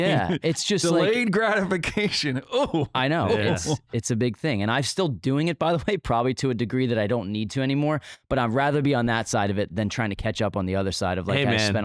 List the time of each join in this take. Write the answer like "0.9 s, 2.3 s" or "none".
none